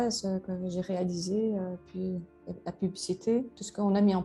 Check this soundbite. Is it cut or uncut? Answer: uncut